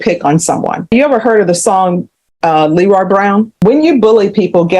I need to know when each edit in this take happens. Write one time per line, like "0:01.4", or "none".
0:00.9
0:03.5